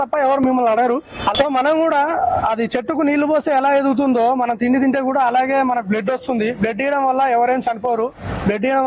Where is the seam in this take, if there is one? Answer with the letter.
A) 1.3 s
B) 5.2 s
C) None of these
A